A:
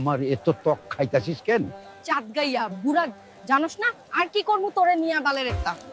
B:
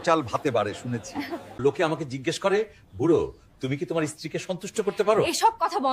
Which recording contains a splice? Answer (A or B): B